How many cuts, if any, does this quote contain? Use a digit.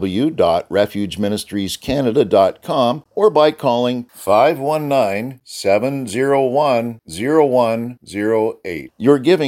1